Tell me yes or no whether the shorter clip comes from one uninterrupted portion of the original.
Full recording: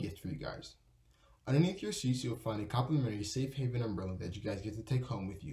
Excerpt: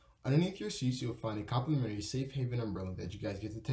yes